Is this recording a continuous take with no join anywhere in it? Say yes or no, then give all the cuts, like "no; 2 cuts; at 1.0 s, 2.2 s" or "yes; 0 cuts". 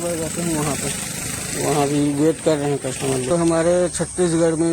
no; 1 cut; at 3.2 s